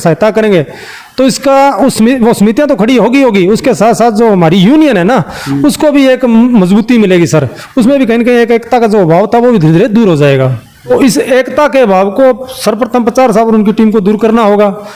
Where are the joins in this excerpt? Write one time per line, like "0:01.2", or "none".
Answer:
0:10.9